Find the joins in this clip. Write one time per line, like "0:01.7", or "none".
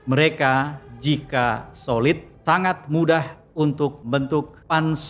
0:02.3
0:04.0